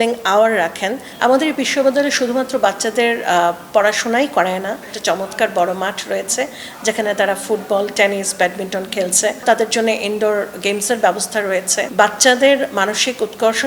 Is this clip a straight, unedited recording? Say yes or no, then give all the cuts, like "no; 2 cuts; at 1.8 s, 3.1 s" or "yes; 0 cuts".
no; 4 cuts; at 1.1 s, 4.9 s, 9.4 s, 11.9 s